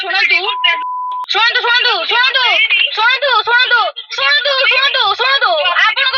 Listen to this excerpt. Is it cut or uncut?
uncut